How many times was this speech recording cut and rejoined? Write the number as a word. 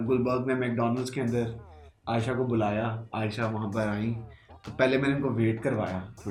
zero